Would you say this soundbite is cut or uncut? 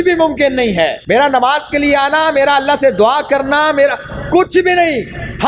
cut